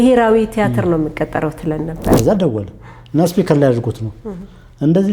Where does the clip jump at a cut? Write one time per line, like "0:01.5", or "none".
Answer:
0:02.2

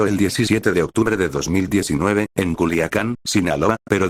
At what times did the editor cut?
none

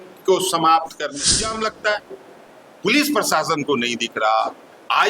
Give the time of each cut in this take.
0:01.6

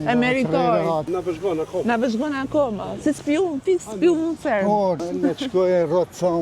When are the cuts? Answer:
0:01.0
0:05.0

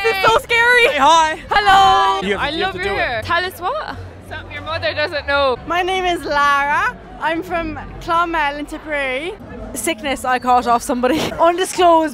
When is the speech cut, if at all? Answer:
0:02.2
0:05.6
0:09.5

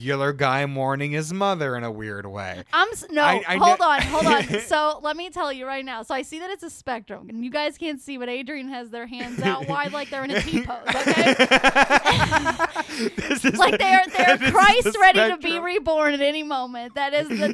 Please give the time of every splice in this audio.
none

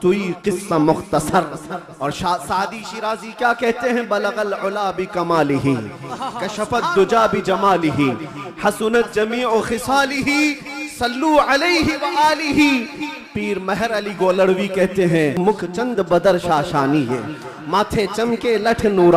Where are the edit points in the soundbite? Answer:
0:15.4

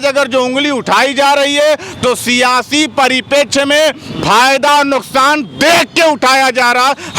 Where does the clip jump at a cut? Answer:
none

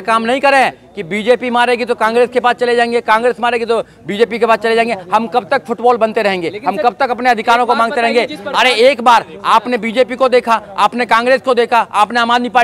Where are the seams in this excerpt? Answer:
none

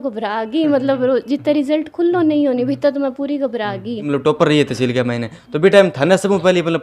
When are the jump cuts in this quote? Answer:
0:04.0

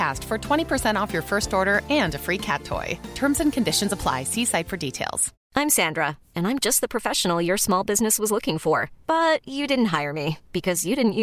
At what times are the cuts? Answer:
0:05.3

